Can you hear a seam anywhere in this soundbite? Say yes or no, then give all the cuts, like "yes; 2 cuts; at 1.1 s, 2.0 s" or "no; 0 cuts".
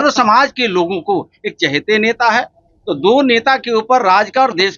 no; 0 cuts